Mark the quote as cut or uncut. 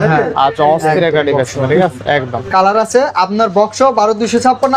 uncut